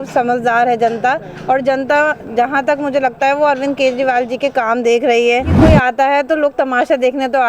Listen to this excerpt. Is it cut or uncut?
cut